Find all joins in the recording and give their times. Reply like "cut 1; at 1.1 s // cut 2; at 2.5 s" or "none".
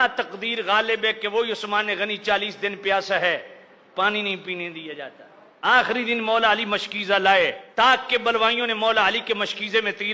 none